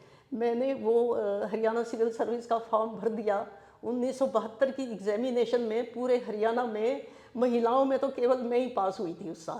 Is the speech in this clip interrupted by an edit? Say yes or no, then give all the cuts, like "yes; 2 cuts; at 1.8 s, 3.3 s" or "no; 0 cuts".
no; 0 cuts